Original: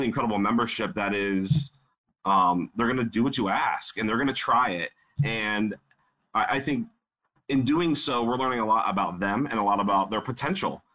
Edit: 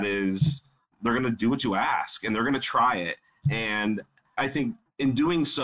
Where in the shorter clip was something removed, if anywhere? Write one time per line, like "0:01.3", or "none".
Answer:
0:01.0
0:04.5